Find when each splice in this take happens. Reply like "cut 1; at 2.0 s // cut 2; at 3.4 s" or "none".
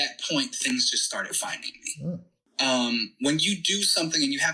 cut 1; at 2.4 s